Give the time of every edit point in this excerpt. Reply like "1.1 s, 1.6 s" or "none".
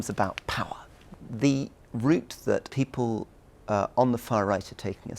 1.1 s, 2.7 s